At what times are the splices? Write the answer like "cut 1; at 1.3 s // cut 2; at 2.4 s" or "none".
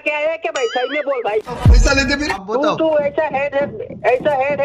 cut 1; at 2.4 s